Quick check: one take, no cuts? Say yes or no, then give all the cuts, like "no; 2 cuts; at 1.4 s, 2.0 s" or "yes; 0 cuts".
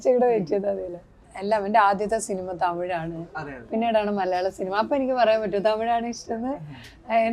no; 1 cut; at 1.3 s